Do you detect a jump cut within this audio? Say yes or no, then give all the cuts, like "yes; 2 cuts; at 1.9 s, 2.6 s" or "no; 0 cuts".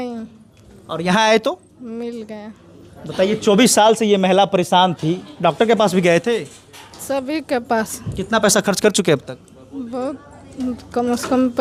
no; 0 cuts